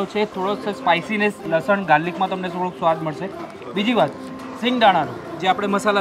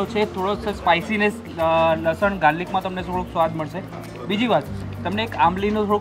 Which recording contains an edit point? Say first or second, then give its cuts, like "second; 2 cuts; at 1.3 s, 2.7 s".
first; 2 cuts; at 1.5 s, 4.4 s